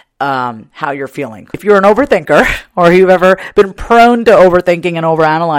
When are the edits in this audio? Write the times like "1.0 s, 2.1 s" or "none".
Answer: 1.6 s